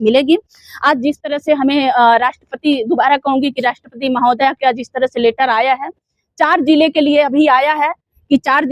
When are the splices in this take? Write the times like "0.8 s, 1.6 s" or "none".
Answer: none

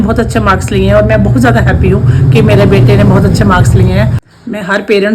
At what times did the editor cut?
4.2 s

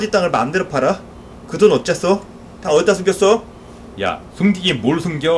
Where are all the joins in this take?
none

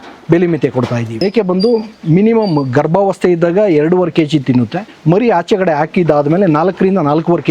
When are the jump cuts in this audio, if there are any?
1.2 s, 4.8 s

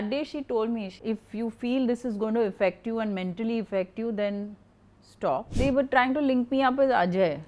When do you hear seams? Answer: 0.9 s, 5.5 s

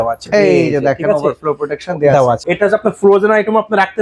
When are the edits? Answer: 2.4 s

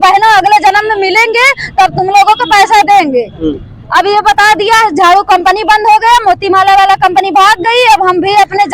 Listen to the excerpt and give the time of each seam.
none

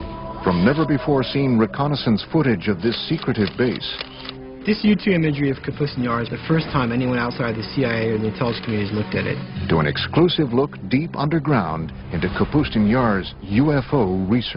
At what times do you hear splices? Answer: none

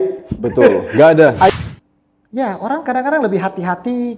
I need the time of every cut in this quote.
1.5 s

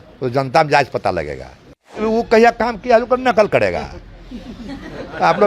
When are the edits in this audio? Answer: 2.0 s

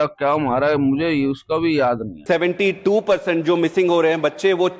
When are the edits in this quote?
2.1 s

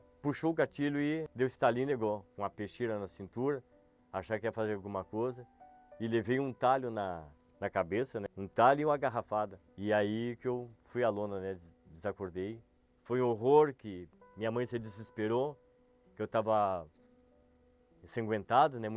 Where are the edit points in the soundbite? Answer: 2.3 s, 12.8 s

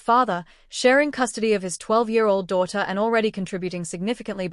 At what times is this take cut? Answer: none

